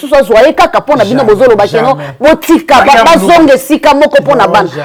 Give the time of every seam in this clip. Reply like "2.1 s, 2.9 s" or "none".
none